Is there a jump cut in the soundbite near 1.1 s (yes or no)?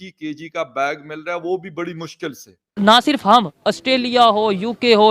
no